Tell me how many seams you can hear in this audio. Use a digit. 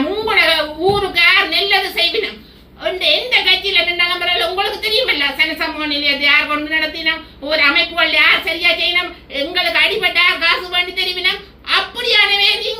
0